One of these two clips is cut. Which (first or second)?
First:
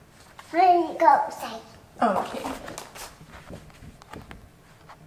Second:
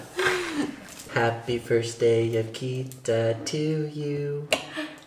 second